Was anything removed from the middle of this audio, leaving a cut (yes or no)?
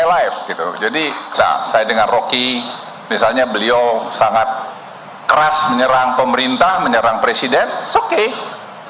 yes